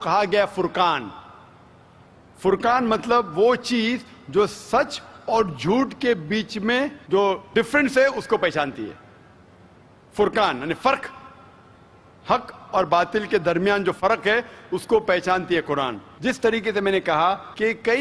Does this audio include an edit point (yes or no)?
yes